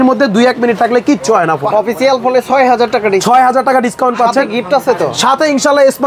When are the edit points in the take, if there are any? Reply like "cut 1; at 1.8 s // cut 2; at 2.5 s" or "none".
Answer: cut 1; at 1.6 s